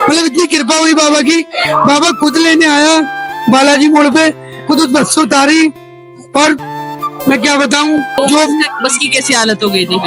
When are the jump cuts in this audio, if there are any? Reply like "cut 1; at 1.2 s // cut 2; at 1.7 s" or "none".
cut 1; at 8.2 s